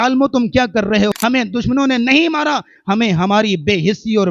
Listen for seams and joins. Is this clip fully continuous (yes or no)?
no